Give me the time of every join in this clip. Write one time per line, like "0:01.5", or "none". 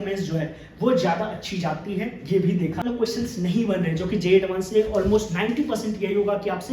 0:02.8